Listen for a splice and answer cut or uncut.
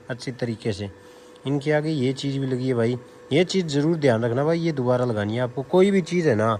uncut